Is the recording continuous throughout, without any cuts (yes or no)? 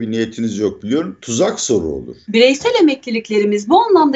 no